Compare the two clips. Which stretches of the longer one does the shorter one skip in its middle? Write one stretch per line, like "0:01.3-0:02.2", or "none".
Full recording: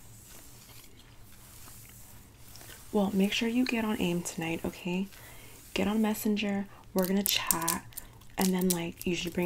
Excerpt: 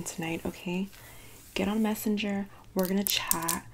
none